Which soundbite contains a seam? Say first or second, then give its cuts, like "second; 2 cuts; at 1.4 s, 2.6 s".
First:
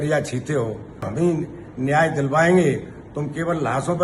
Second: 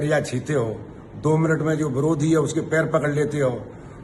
first; 1 cut; at 1.1 s